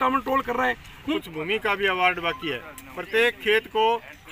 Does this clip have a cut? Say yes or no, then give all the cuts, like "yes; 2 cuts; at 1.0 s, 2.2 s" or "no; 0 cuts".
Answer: yes; 1 cut; at 1.1 s